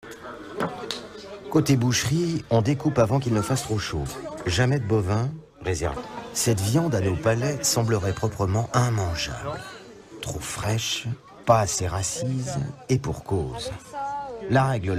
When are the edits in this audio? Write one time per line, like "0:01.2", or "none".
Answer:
none